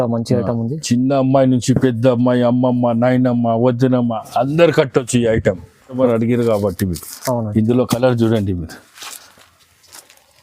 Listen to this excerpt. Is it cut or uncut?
cut